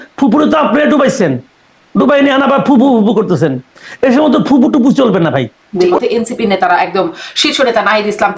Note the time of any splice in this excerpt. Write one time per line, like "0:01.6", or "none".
0:05.8